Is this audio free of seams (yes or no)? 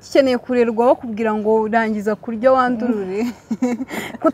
yes